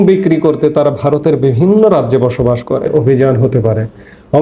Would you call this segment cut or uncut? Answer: cut